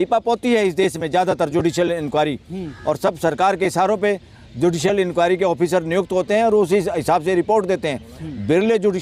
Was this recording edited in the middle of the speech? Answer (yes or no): no